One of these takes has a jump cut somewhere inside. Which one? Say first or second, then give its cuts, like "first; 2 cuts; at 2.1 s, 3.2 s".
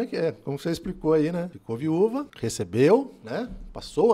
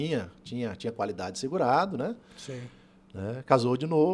first; 2 cuts; at 1.6 s, 2.3 s